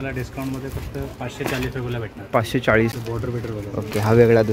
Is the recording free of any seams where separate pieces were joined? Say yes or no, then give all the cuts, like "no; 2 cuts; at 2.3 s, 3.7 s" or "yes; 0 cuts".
no; 1 cut; at 3.2 s